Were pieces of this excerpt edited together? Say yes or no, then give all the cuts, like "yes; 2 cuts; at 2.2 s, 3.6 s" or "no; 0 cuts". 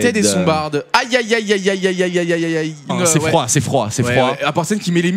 no; 0 cuts